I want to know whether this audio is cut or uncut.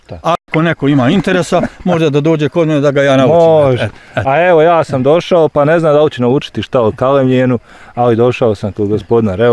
uncut